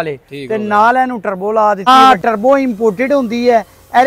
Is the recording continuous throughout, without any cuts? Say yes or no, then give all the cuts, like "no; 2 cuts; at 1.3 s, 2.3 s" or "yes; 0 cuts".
no; 1 cut; at 1.9 s